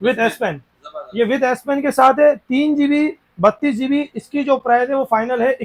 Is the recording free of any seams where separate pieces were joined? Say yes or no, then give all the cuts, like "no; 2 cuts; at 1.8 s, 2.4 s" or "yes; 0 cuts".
yes; 0 cuts